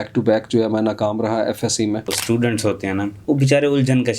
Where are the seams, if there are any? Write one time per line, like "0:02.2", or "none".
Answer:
0:02.2
0:03.1